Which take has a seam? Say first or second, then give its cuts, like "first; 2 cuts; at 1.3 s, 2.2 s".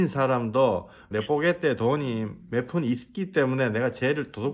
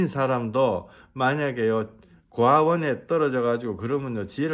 first; 1 cut; at 1.1 s